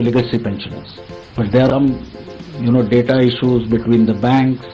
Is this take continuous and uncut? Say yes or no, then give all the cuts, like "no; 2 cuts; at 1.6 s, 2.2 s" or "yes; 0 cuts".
no; 1 cut; at 1.7 s